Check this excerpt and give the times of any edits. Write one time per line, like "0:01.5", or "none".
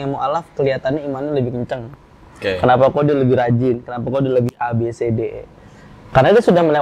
none